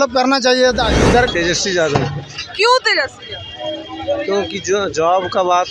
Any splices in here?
yes; 1 cut; at 1.3 s

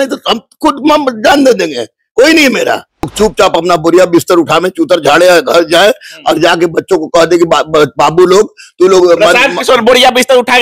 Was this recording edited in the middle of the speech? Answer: yes; 1 cut; at 3.1 s

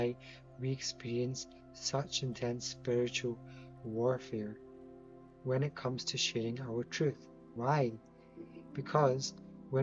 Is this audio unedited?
yes; 0 cuts

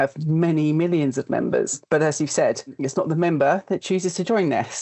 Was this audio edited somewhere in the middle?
yes; 1 cut; at 2.7 s

